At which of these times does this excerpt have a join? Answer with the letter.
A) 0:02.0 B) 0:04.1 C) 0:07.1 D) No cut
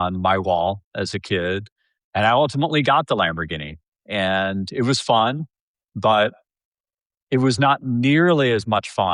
D